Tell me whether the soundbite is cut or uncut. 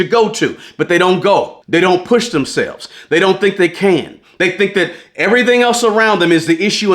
cut